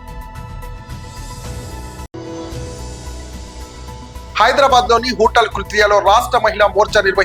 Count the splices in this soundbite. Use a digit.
0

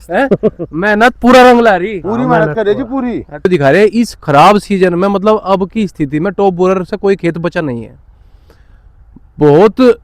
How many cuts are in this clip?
1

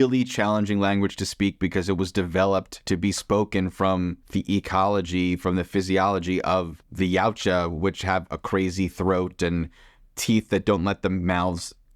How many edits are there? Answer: 3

